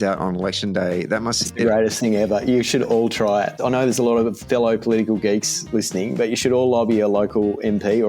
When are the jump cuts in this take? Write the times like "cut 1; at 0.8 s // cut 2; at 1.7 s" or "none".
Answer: cut 1; at 3.6 s